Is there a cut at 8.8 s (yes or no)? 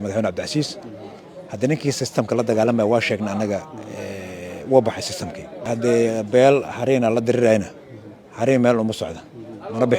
no